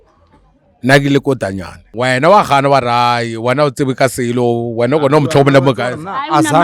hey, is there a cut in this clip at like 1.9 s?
yes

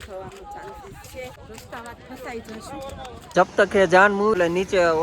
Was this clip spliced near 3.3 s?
yes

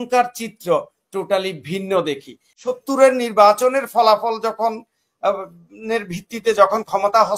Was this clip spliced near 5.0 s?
no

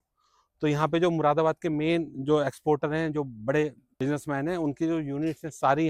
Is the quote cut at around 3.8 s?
yes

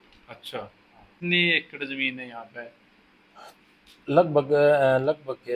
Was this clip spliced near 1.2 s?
yes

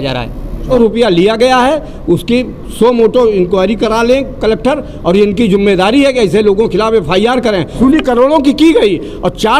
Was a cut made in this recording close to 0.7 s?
yes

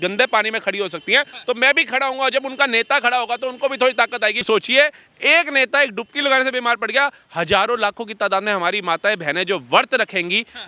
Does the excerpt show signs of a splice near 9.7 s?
no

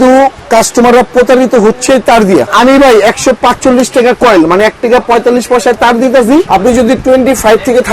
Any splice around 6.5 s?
yes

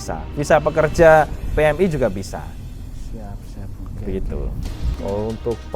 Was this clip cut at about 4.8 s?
yes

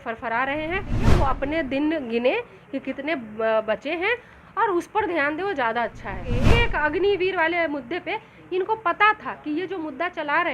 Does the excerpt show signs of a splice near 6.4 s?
yes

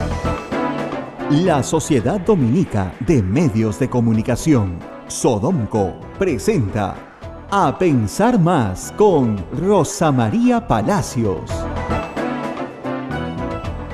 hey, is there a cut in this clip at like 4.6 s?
no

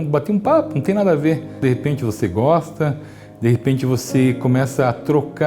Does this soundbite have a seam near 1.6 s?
yes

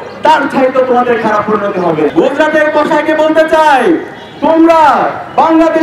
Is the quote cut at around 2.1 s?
yes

